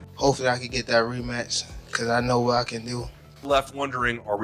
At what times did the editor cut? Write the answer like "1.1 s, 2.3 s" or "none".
3.5 s